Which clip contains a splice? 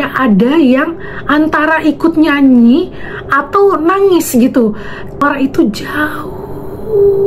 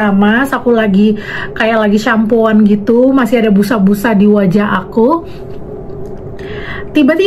first; 1 cut; at 5.2 s

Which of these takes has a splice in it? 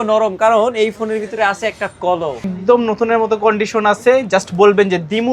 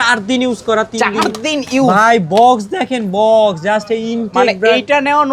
first; 1 cut; at 2.5 s

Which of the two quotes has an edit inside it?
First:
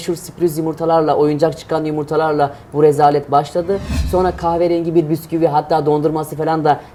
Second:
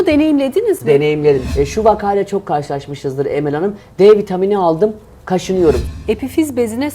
second; 2 cuts; at 1.5 s, 5.8 s

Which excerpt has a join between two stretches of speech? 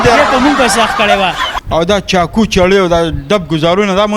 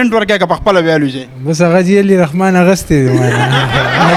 first; 1 cut; at 1.5 s

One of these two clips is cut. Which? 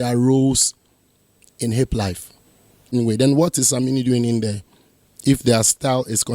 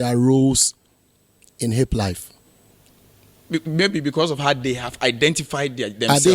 first; 1 cut; at 2.8 s

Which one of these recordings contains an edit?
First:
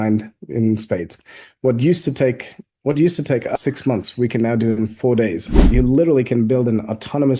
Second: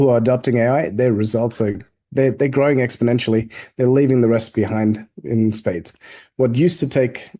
first; 2 cuts; at 3.6 s, 5.6 s

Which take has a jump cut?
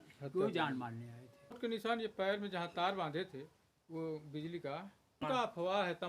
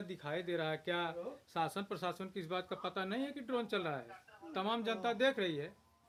first; 2 cuts; at 1.6 s, 5.1 s

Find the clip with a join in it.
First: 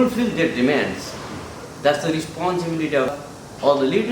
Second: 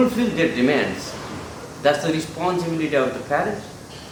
first; 1 cut; at 3.2 s

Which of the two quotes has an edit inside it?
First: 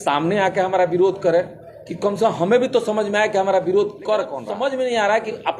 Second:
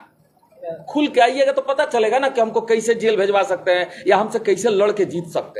first; 1 cut; at 4.4 s

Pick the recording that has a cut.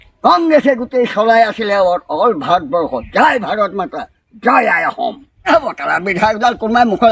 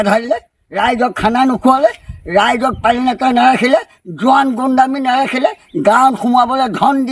first; 1 cut; at 5.5 s

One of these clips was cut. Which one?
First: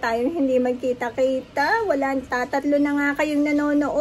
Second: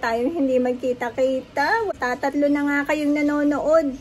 second; 1 cut; at 1.9 s

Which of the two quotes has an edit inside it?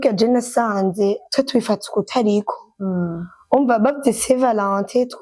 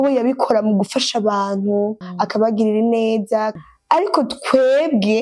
second; 2 cuts; at 2.0 s, 3.6 s

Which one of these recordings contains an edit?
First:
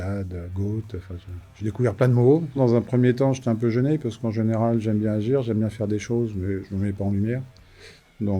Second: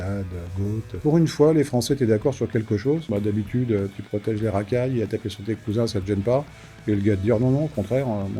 second; 2 cuts; at 1.0 s, 3.1 s

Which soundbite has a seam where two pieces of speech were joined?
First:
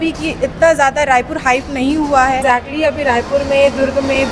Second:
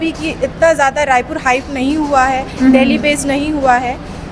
first; 1 cut; at 2.4 s

